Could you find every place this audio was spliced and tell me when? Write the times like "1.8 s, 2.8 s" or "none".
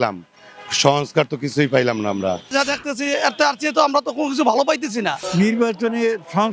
2.5 s, 5.2 s